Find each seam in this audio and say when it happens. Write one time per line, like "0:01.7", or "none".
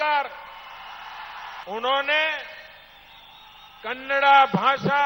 0:01.5